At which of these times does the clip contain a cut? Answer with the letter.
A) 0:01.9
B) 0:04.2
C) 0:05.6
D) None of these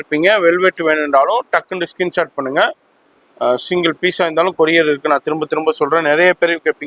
D